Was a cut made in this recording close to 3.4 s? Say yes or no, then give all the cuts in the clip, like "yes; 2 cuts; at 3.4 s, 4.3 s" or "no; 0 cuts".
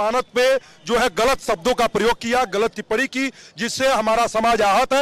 no; 0 cuts